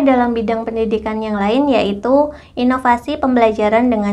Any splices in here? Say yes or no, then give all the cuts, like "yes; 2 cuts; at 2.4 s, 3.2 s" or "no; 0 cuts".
no; 0 cuts